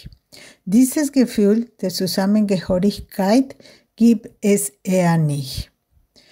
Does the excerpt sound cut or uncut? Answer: uncut